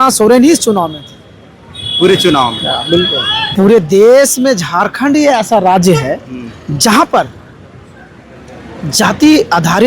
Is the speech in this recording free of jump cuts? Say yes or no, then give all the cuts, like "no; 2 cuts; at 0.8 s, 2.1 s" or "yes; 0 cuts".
no; 1 cut; at 3.5 s